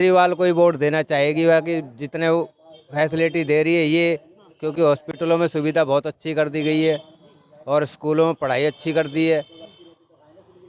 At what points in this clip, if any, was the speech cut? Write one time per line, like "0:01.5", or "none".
none

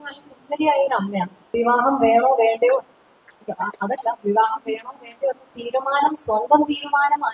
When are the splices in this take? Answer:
0:01.4

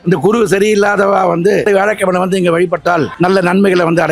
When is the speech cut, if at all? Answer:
0:01.7
0:03.1

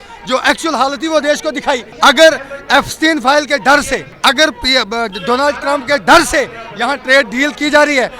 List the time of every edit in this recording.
0:01.9
0:04.1

